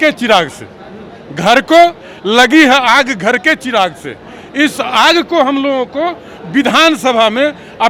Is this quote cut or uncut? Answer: uncut